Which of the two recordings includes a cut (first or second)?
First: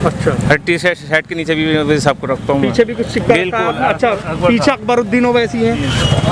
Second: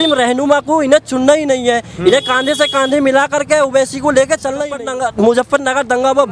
second